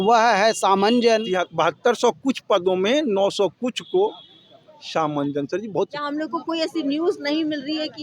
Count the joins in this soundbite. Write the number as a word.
two